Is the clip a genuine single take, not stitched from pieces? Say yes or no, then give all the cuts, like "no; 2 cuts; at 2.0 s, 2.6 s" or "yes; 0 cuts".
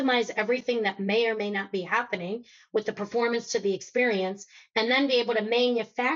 yes; 0 cuts